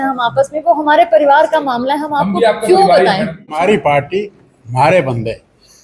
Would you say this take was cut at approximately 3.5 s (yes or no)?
yes